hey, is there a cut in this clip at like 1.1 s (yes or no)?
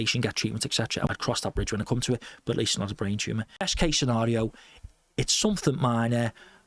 yes